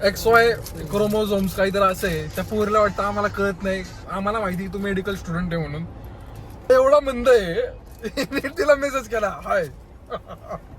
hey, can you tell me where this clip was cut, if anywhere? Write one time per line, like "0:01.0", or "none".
0:06.7